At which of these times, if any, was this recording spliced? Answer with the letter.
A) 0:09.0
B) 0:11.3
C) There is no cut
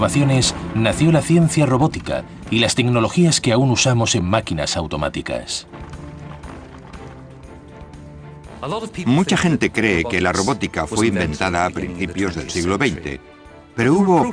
B